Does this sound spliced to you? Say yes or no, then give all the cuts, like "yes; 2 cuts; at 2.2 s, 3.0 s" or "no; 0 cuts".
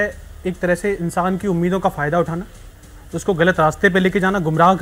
no; 0 cuts